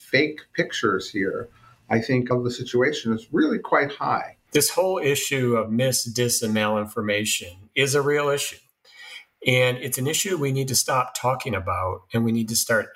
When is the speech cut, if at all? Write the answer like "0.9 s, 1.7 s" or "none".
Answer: 2.3 s, 4.3 s